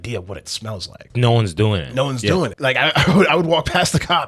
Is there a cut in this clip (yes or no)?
yes